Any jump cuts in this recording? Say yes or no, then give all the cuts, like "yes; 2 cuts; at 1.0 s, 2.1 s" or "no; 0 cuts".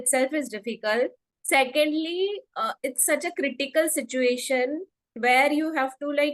no; 0 cuts